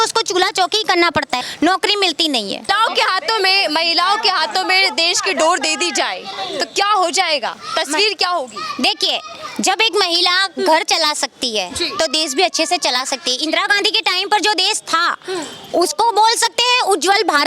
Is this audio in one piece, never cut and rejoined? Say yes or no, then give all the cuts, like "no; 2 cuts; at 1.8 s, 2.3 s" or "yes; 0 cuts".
no; 2 cuts; at 1.5 s, 2.6 s